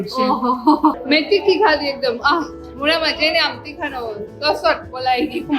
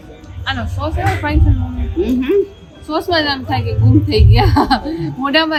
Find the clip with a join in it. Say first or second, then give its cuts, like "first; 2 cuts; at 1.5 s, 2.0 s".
first; 1 cut; at 1.0 s